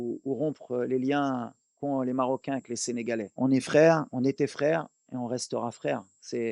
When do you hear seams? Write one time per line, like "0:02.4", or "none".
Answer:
none